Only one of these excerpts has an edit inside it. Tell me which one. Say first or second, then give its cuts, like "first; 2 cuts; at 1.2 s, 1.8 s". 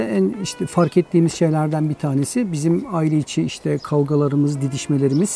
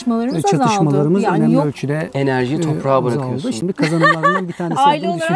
second; 1 cut; at 3.6 s